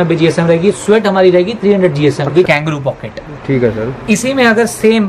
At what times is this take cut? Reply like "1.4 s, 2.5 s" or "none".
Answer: 2.5 s